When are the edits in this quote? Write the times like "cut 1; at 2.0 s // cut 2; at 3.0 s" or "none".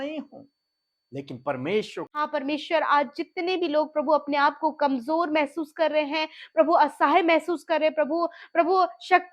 cut 1; at 2.3 s